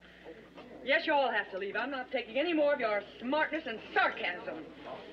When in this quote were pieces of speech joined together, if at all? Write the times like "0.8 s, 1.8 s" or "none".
1.8 s